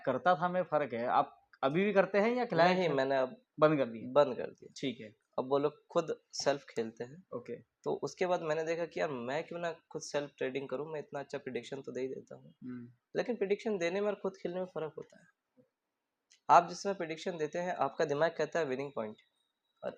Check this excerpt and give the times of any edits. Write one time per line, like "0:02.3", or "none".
none